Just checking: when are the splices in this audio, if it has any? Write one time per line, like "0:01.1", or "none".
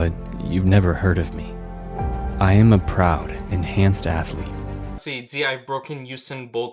0:05.1